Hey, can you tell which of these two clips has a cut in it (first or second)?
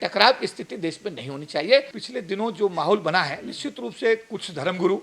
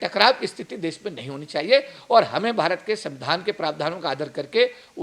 first